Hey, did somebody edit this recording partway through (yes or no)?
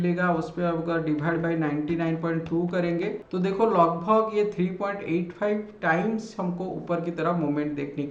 no